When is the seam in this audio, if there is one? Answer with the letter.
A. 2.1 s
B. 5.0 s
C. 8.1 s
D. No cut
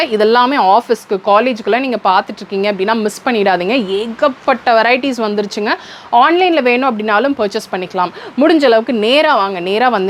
D